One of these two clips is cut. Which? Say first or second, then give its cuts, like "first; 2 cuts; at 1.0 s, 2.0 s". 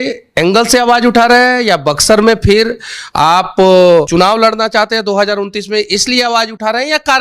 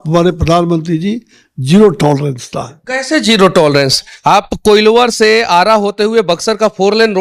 first; 1 cut; at 4.1 s